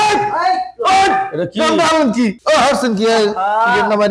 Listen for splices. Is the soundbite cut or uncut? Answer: uncut